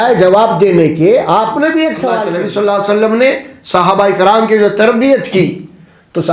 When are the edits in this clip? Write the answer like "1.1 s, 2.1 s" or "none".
2.2 s